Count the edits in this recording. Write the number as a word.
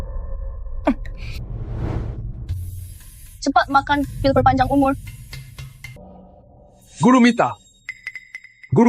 one